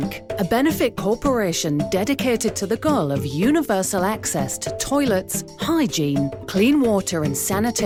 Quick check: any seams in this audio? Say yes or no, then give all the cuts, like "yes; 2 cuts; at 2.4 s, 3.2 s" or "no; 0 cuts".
no; 0 cuts